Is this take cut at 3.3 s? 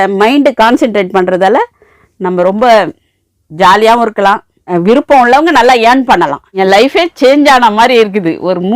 no; 2 cuts; at 4.6 s, 6.5 s

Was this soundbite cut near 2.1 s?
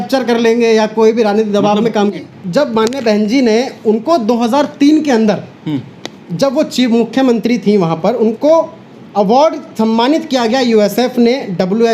yes; 1 cut; at 2.1 s

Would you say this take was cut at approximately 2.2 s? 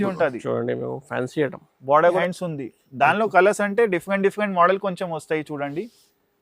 yes; 1 cut; at 2.2 s

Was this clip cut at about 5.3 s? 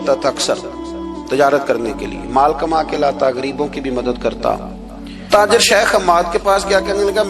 yes; 1 cut; at 5.3 s

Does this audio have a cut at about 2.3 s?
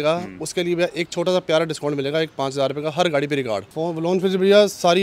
no; 1 cut; at 3.7 s

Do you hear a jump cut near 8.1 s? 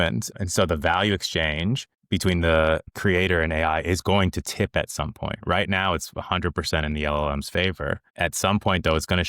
no; 1 cut; at 2.9 s

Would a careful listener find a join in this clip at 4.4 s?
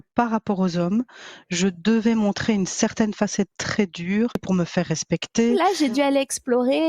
yes; 2 cuts; at 4.4 s, 5.6 s

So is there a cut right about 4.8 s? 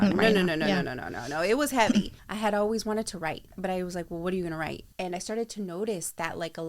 yes; 3 cuts; at 2.2 s, 3.5 s, 4.8 s

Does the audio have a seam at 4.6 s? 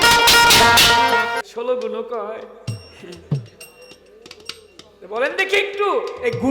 no; 1 cut; at 1.4 s

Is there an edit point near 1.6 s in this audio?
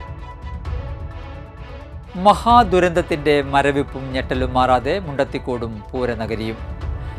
yes; 1 cut; at 1.6 s

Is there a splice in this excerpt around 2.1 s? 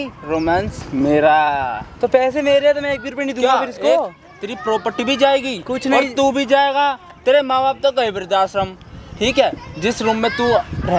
no; 0 cuts

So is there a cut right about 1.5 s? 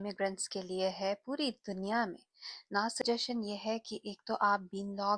no; 1 cut; at 3.0 s

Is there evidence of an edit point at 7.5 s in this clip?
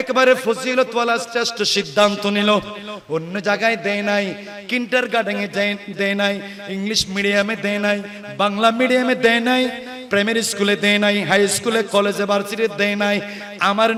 no; 0 cuts

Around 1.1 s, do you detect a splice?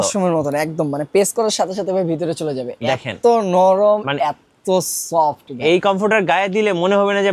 no; 0 cuts

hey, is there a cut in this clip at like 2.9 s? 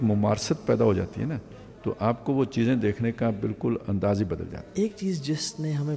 no; 1 cut; at 4.6 s

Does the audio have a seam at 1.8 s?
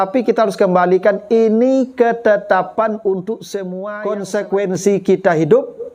no; 1 cut; at 3.9 s

